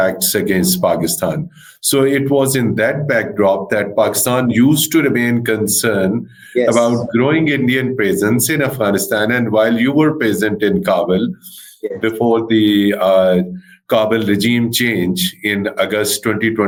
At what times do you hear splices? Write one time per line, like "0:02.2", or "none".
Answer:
none